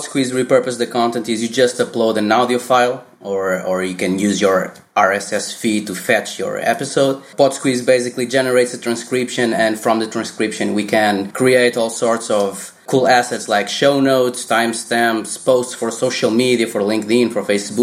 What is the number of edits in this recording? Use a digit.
3